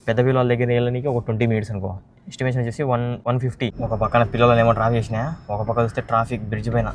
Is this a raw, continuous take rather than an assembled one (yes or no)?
no